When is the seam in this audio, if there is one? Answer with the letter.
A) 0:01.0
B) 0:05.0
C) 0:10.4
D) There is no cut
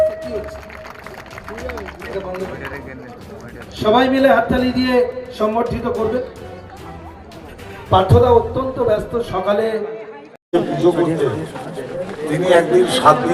C